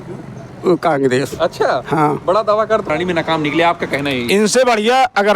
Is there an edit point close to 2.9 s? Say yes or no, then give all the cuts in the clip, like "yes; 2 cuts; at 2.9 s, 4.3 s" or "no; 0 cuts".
yes; 1 cut; at 2.9 s